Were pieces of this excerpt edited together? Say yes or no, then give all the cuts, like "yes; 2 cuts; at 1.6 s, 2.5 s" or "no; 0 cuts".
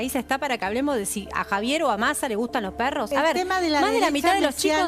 yes; 1 cut; at 3.1 s